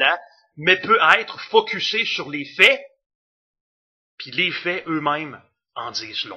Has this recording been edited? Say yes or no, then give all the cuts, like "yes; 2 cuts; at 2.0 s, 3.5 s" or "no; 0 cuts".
yes; 1 cut; at 1.3 s